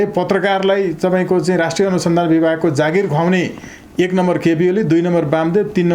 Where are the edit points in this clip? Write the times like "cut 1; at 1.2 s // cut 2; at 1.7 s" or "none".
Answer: none